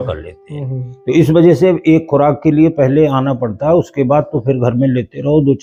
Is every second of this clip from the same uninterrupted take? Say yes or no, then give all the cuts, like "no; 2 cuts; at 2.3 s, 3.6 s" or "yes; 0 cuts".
yes; 0 cuts